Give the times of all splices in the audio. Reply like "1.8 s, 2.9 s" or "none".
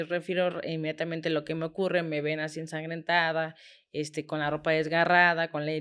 none